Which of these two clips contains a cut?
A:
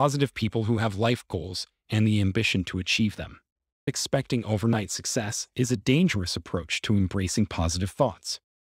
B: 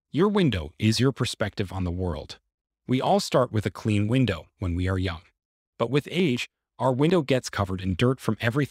A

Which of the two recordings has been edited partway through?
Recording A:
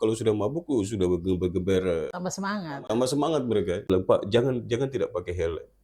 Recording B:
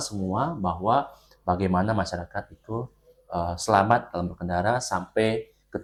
A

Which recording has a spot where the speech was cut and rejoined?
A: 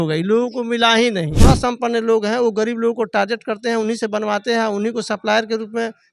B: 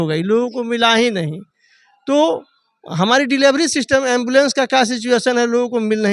A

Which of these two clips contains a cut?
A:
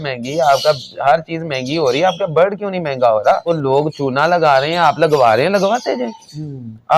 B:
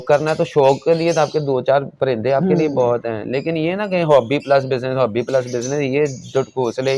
A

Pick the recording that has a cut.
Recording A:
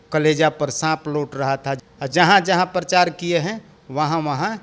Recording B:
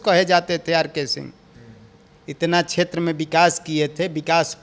A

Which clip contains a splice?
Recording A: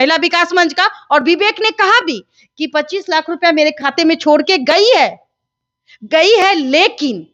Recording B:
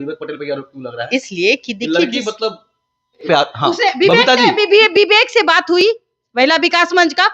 B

